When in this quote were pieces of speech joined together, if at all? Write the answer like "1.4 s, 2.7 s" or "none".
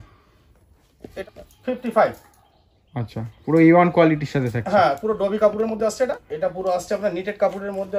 1.1 s, 6.3 s